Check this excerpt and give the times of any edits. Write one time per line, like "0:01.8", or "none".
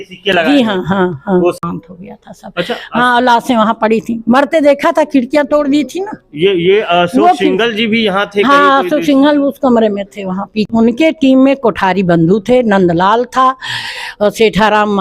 0:01.6
0:10.7